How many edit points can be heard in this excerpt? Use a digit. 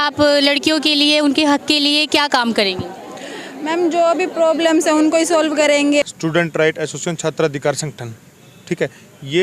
1